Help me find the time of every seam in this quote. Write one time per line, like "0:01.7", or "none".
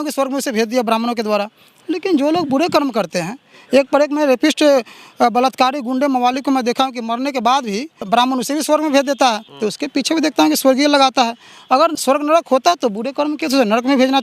0:08.0
0:09.5
0:11.9